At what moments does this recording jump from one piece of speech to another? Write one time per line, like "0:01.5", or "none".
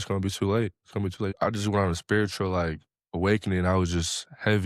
0:01.3